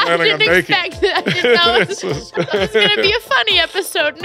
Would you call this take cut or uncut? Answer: cut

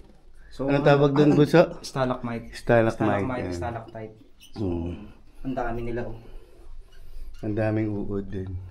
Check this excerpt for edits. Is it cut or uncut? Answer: uncut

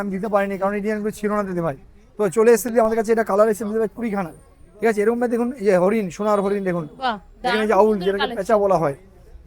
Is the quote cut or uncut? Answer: uncut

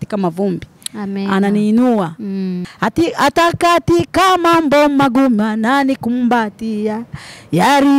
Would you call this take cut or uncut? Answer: cut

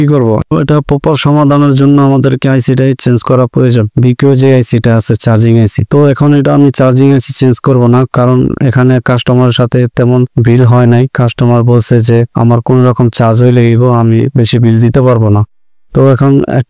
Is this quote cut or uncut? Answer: uncut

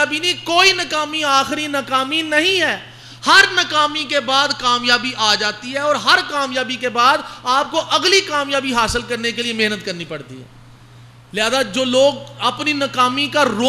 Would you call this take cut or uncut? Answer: uncut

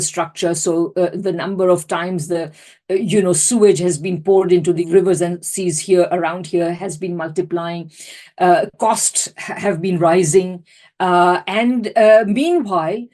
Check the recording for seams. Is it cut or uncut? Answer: cut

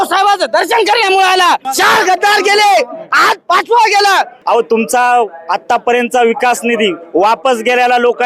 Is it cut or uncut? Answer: cut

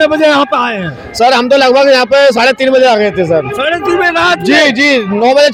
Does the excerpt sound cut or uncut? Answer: uncut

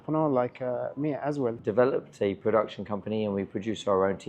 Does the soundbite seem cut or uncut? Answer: cut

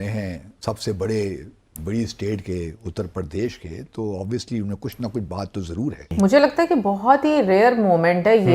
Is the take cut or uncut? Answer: cut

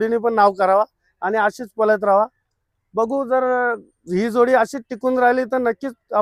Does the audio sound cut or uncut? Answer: uncut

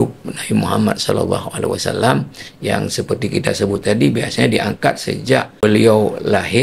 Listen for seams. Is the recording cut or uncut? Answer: cut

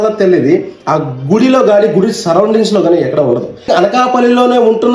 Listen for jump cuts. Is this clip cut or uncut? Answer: cut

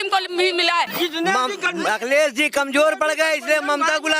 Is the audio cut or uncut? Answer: cut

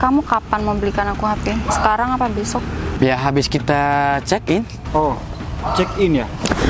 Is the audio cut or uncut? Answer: cut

